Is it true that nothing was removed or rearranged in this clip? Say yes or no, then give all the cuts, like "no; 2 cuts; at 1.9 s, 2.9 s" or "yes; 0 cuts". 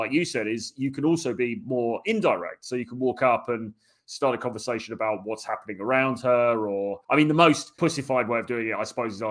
no; 2 cuts; at 7.0 s, 7.7 s